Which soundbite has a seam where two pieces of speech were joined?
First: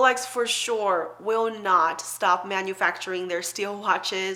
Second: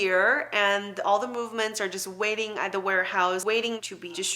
second; 1 cut; at 3.4 s

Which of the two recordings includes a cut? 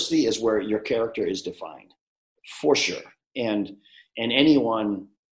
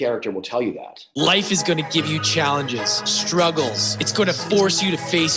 second; 1 cut; at 1.0 s

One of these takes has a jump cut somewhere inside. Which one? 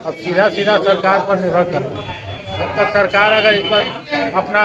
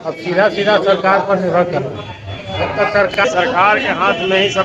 second; 1 cut; at 3.2 s

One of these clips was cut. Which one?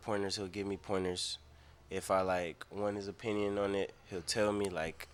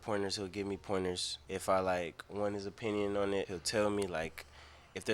second; 2 cuts; at 1.3 s, 3.6 s

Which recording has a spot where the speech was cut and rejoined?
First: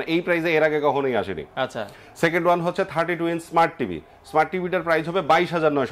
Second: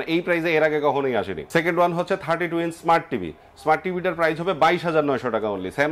second; 1 cut; at 1.4 s

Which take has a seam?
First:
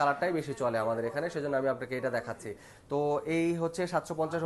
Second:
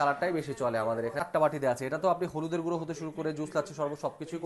second; 1 cut; at 1.2 s

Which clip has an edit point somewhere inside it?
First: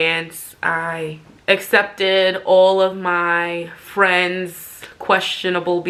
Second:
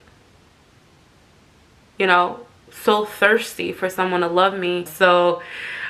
second; 1 cut; at 4.9 s

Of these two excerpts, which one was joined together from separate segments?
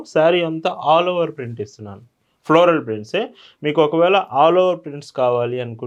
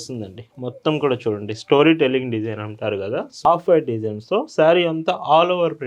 second; 1 cut; at 3.4 s

